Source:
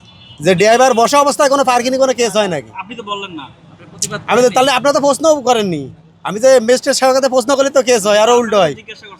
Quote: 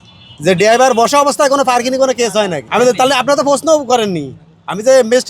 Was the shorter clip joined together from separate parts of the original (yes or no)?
yes